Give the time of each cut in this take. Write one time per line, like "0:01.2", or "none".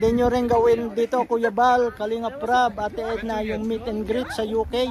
none